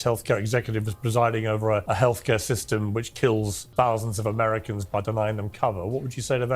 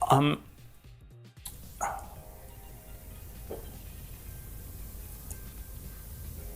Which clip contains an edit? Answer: first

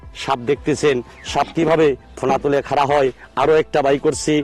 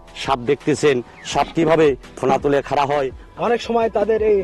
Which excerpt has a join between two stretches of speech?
second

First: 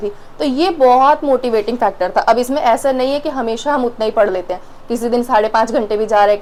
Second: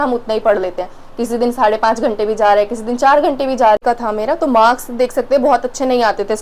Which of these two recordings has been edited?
second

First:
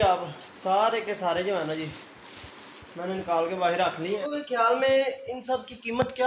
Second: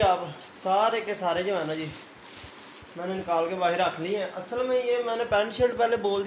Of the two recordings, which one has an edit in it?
first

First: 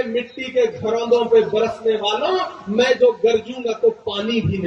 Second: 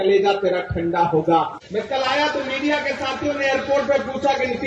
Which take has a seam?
second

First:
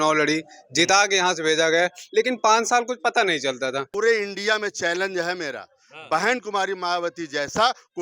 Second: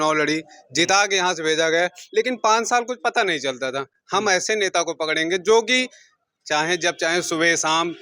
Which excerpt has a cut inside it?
first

